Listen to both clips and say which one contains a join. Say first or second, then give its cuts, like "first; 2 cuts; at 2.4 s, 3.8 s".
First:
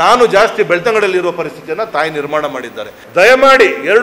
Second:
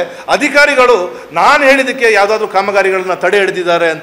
first; 1 cut; at 3.0 s